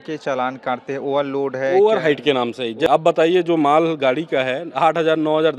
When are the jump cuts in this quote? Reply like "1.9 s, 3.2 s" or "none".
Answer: 2.9 s